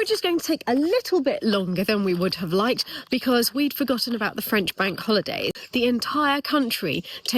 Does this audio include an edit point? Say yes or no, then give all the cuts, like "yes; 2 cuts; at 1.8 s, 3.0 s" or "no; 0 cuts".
yes; 1 cut; at 5.6 s